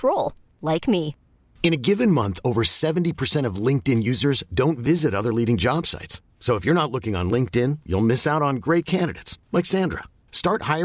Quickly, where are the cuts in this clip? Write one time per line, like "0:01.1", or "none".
none